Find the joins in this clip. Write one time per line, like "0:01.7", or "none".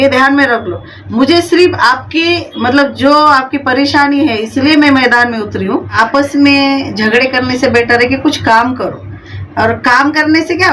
0:05.9